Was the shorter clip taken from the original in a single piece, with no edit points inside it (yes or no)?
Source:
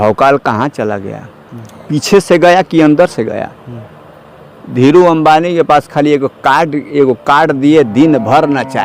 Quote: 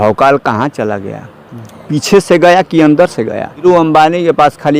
no